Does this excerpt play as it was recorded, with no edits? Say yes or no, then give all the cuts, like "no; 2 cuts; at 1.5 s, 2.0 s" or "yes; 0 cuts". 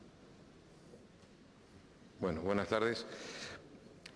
no; 1 cut; at 1.6 s